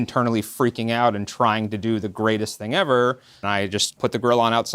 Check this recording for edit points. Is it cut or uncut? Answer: cut